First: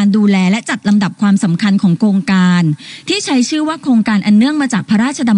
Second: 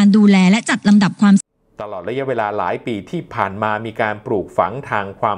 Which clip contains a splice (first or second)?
second